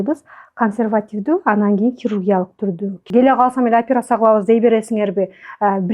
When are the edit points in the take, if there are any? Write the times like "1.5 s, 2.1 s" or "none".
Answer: 3.0 s